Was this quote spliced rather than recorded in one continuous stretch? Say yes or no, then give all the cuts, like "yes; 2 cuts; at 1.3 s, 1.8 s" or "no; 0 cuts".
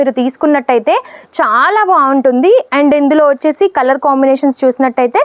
no; 0 cuts